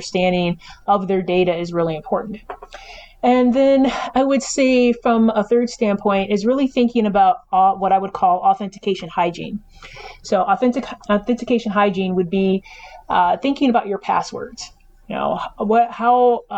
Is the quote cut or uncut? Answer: uncut